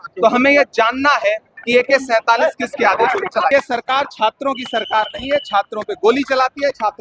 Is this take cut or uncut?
cut